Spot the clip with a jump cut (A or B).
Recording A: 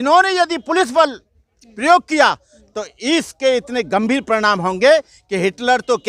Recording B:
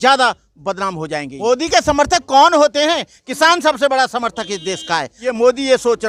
B